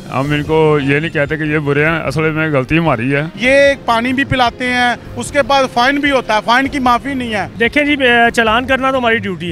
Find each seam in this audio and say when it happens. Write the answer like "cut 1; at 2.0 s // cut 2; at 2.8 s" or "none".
cut 1; at 3.3 s // cut 2; at 7.5 s